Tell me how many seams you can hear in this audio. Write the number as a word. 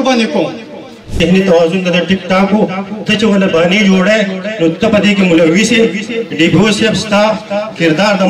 one